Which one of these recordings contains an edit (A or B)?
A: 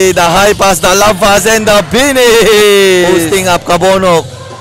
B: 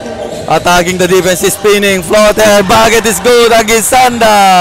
A